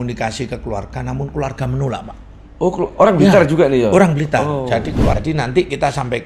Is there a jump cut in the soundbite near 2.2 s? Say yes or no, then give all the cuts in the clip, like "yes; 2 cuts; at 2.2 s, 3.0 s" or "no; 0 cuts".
no; 1 cut; at 5.2 s